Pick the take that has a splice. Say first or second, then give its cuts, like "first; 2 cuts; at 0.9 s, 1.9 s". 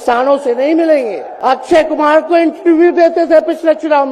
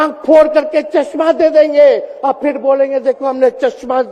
first; 1 cut; at 1.3 s